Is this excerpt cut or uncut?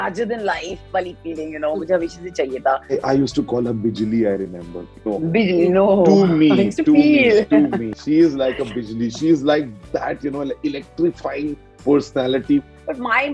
cut